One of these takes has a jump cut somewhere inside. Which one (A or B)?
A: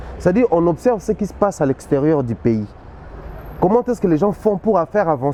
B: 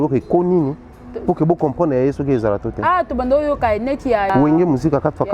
B